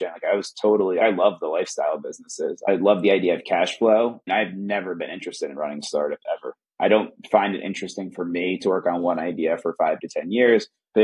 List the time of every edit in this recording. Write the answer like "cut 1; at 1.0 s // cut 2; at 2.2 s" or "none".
cut 1; at 1.0 s // cut 2; at 4.2 s // cut 3; at 6.6 s